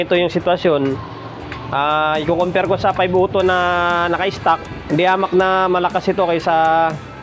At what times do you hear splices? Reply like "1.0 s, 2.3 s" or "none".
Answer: 4.7 s